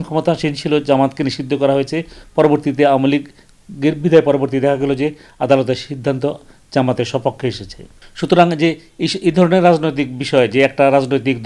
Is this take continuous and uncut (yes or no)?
yes